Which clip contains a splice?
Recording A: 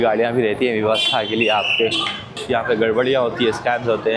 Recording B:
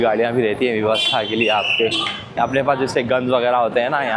B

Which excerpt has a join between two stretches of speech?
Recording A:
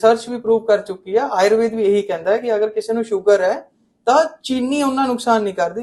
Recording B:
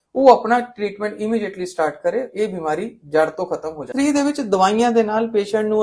B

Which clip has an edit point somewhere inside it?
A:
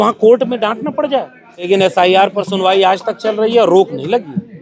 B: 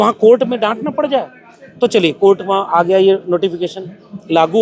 A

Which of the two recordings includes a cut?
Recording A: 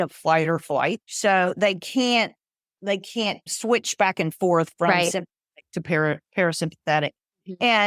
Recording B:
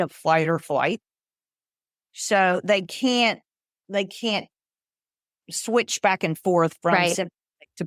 A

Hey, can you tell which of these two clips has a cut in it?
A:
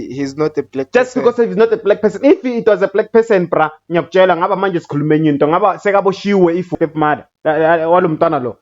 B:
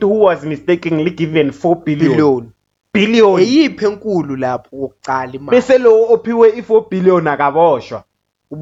A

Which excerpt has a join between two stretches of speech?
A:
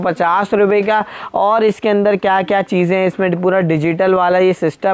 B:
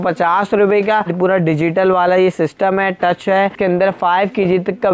B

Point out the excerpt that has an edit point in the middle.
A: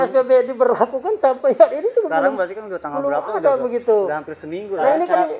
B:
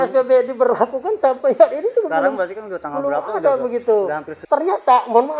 B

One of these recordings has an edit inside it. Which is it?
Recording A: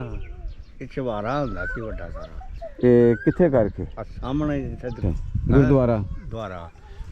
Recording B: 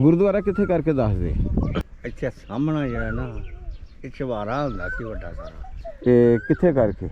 A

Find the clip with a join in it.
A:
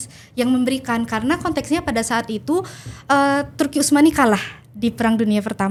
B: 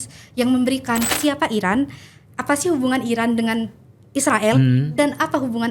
B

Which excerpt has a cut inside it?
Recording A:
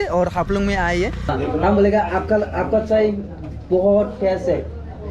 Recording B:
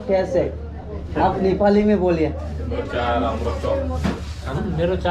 A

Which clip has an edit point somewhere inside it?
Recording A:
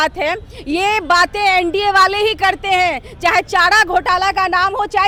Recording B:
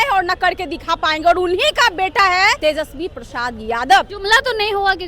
B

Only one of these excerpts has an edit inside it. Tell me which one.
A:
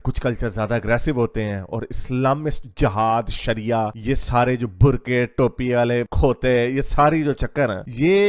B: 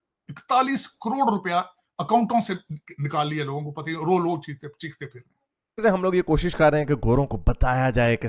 B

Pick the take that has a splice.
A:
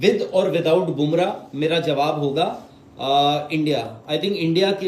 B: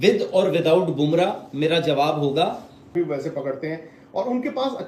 B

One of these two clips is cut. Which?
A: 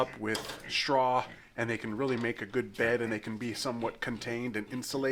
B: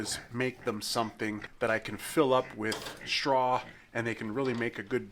B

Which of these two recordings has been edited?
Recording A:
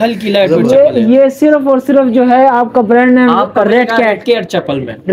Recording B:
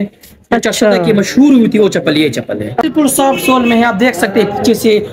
B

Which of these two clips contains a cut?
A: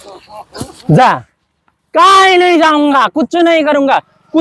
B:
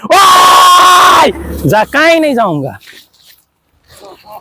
B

